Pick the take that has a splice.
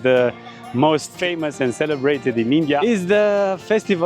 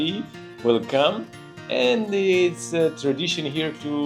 first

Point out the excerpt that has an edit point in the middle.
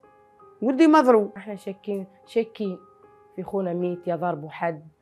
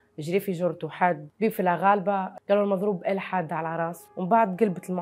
second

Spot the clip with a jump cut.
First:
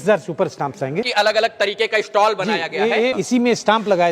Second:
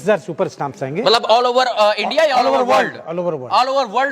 first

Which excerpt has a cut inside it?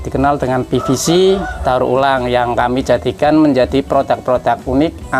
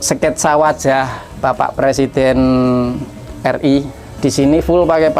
second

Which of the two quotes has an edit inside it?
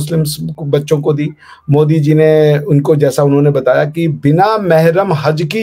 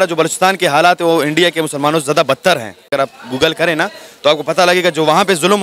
second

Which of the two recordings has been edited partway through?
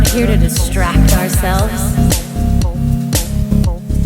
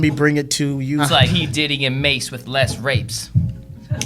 second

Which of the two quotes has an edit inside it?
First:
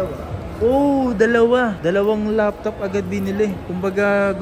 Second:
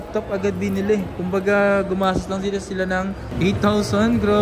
second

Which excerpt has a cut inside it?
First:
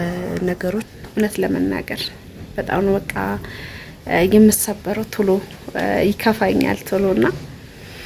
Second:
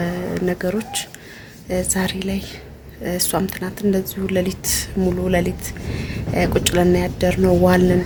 first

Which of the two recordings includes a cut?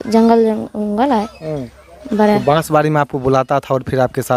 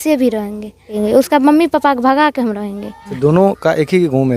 second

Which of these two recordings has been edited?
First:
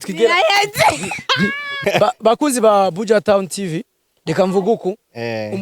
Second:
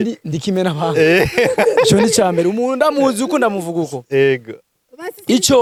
first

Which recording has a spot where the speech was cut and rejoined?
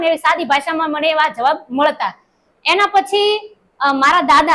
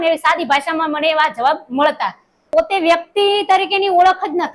second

